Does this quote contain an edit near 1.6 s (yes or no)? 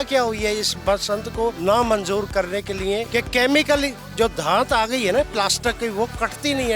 yes